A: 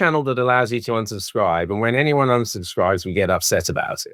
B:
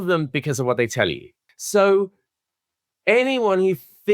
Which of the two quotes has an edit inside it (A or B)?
B